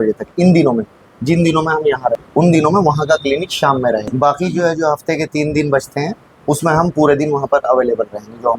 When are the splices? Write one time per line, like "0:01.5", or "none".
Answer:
0:02.2
0:04.1